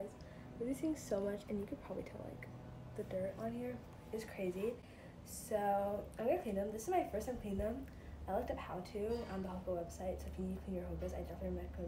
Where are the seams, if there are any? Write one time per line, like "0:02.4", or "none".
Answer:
none